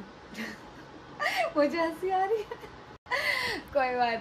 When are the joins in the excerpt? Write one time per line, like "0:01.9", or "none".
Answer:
none

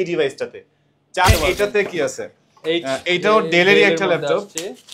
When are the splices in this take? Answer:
0:01.3

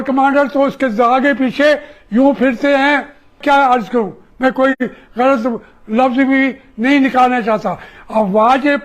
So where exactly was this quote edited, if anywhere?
0:03.4

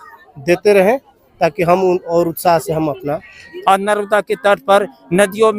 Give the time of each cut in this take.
0:03.5

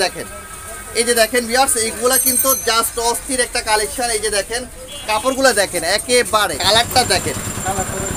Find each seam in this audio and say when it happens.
0:06.6

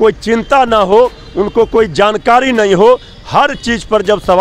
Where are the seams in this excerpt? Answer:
none

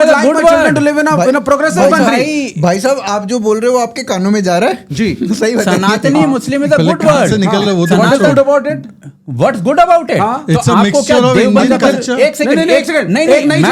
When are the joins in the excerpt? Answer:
none

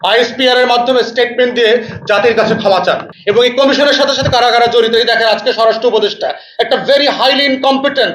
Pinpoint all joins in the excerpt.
0:03.1

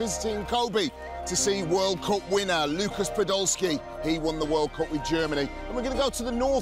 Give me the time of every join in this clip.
0:03.9

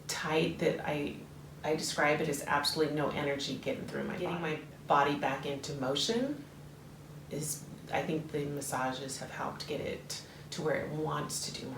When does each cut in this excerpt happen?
0:04.3

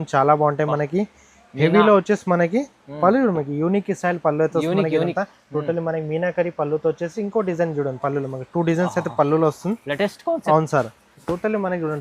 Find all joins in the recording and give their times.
0:11.0

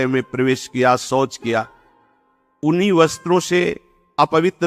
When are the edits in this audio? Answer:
none

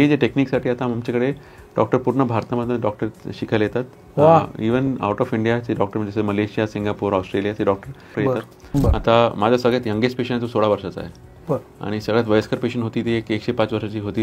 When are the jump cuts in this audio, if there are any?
0:08.4

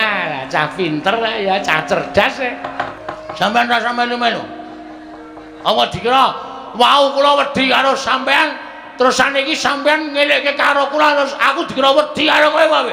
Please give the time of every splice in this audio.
0:02.9

